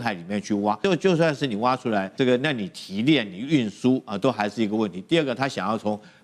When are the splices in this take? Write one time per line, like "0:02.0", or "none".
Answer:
0:00.8
0:02.1